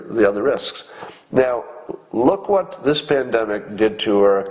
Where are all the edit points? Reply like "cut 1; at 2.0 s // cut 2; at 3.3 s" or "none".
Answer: none